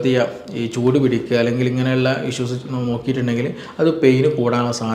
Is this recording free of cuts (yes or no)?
yes